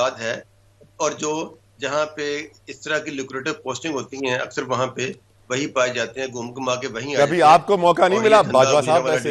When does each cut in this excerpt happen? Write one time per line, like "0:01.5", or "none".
none